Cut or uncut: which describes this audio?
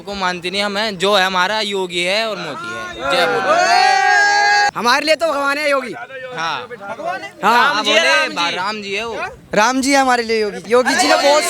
uncut